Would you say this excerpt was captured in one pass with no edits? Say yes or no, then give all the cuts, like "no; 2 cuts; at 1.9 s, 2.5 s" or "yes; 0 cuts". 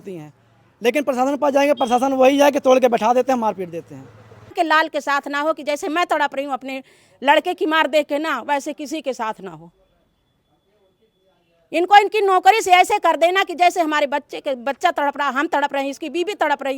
no; 1 cut; at 4.5 s